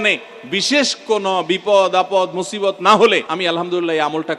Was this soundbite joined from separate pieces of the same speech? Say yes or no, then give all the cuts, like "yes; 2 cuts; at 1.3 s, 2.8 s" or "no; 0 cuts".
yes; 1 cut; at 3.3 s